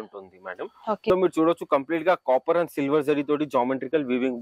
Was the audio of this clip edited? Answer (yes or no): yes